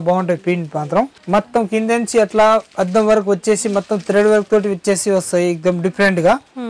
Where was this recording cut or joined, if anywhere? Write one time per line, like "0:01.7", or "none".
0:01.2